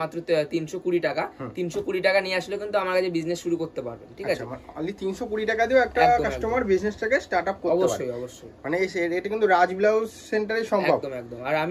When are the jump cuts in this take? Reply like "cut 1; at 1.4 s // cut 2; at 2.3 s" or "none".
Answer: none